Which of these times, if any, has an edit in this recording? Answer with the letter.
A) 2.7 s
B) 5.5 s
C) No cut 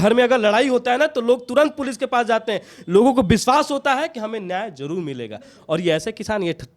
C